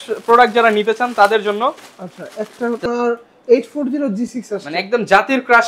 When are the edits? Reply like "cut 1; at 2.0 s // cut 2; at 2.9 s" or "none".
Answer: cut 1; at 2.8 s